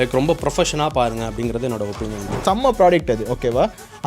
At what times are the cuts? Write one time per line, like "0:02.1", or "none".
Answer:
0:02.3

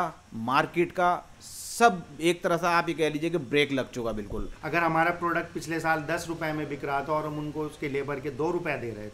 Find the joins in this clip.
0:04.5

